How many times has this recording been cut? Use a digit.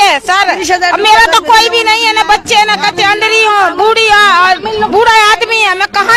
0